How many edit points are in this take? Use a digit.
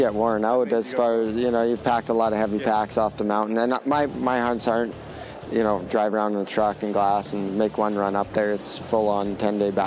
0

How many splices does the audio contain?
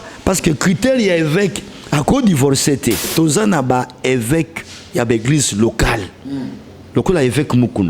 1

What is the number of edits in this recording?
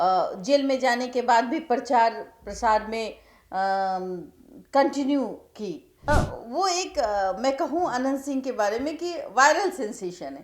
1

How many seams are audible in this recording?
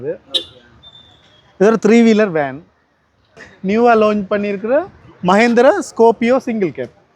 1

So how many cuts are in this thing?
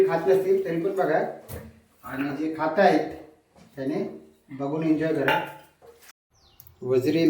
1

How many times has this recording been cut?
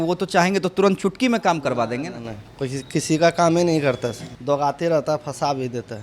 1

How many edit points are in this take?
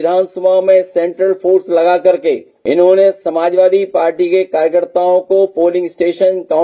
1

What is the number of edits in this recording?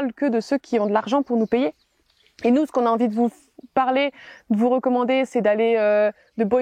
0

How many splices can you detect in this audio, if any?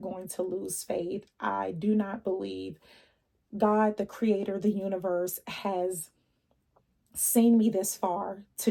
0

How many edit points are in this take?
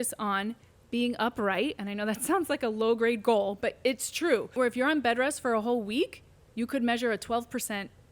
1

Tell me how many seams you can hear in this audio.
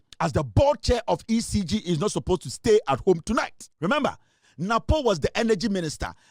1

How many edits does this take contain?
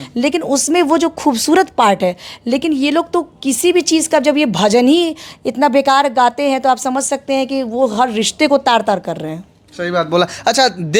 0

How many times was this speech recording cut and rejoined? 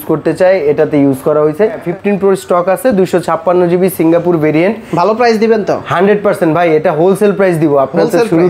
1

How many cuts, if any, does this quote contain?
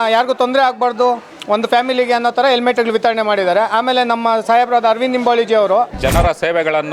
1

